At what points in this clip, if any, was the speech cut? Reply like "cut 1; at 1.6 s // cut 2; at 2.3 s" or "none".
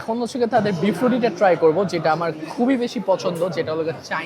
none